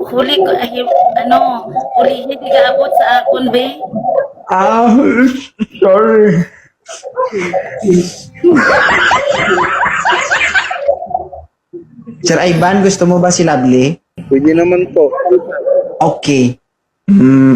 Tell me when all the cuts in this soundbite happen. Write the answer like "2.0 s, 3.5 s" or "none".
14.1 s